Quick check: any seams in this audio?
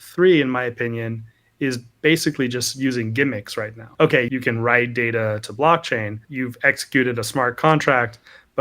yes; 2 cuts; at 4.2 s, 6.2 s

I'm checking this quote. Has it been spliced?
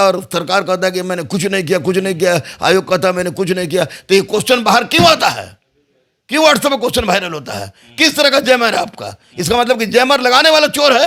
no; 0 cuts

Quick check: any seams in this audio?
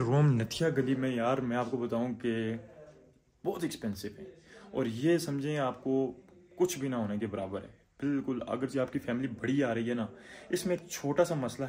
no; 0 cuts

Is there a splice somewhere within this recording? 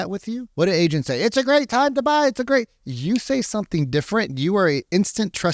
no; 0 cuts

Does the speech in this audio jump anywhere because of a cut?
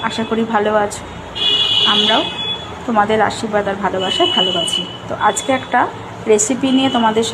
yes; 1 cut; at 2.4 s

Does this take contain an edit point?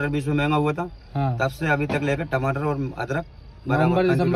no; 0 cuts

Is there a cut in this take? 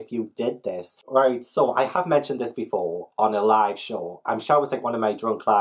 no; 0 cuts

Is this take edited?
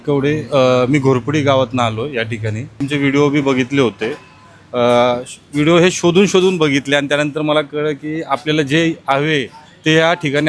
yes; 1 cut; at 2.8 s

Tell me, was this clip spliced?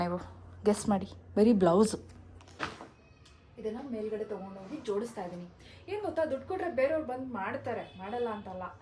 yes; 1 cut; at 2.6 s

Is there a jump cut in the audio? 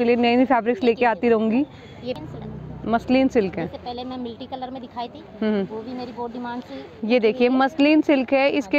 yes; 1 cut; at 2.1 s

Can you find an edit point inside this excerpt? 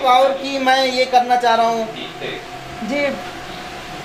no; 0 cuts

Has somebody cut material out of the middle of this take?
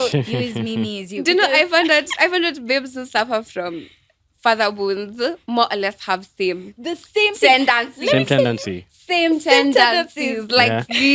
no; 0 cuts

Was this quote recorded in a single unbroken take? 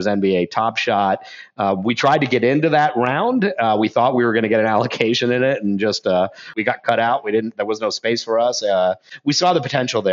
no; 2 cuts; at 6.5 s, 9.1 s

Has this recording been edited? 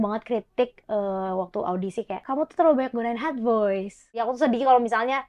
yes; 2 cuts; at 2.2 s, 4.2 s

